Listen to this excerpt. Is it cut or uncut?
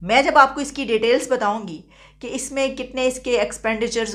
uncut